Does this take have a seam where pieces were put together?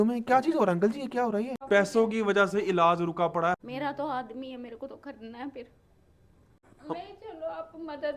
yes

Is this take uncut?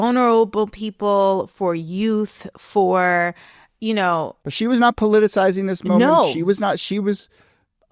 yes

